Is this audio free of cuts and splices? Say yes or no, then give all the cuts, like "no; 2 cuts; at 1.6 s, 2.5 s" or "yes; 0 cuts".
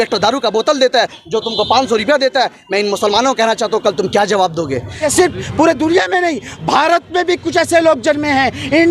no; 1 cut; at 5.0 s